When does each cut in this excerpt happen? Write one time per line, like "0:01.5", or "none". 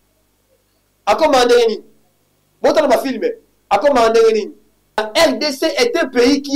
0:05.1